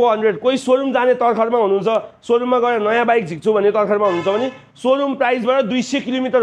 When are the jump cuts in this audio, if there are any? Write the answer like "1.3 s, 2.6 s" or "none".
none